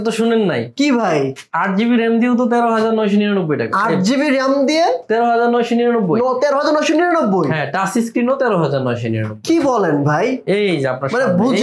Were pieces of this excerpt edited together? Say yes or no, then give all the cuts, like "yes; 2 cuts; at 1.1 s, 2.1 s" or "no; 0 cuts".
no; 0 cuts